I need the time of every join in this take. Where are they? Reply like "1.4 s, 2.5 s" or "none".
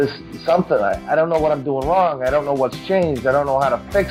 none